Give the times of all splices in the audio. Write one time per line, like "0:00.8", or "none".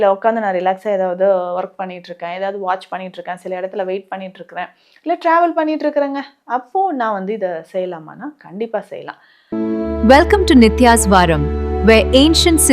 0:09.3